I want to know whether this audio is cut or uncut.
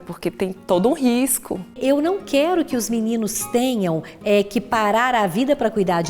cut